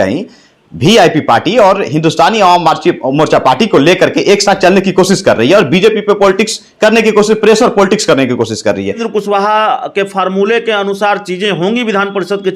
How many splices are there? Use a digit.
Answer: 1